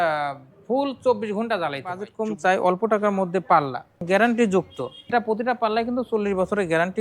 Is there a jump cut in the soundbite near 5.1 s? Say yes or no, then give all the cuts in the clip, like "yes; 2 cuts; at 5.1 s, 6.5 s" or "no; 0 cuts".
yes; 3 cuts; at 2.1 s, 4.0 s, 5.1 s